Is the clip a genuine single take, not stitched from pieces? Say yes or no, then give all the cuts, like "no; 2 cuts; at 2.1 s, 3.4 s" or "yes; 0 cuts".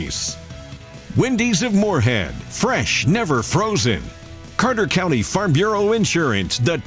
yes; 0 cuts